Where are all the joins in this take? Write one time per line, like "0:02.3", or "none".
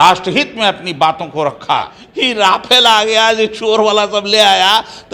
0:02.0